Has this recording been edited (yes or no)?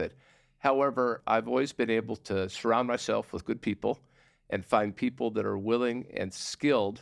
yes